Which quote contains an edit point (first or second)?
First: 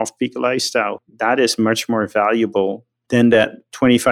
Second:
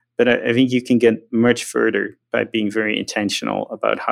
first